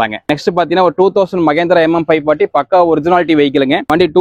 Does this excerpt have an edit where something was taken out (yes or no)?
no